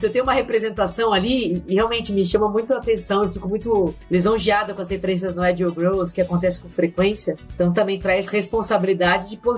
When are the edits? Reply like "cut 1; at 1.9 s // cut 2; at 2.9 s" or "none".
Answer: none